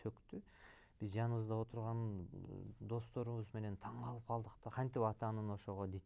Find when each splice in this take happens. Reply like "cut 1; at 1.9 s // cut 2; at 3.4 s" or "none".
cut 1; at 4.7 s